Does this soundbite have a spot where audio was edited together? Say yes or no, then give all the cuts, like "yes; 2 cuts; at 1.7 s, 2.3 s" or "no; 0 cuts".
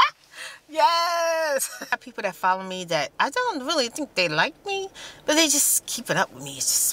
yes; 1 cut; at 2.0 s